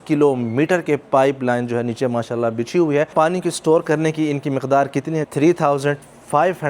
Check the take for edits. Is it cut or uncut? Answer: cut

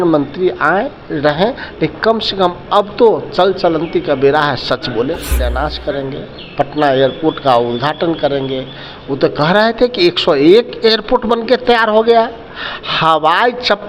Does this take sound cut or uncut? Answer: cut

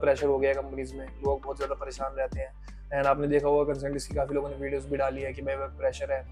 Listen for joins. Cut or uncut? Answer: uncut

